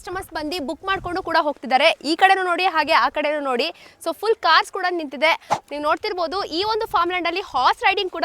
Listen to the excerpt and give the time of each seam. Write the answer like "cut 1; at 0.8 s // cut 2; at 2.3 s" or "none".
cut 1; at 5.5 s